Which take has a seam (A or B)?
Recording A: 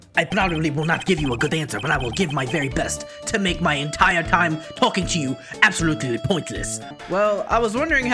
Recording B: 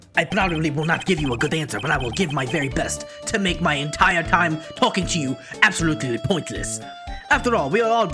A